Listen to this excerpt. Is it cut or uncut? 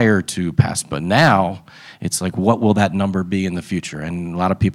uncut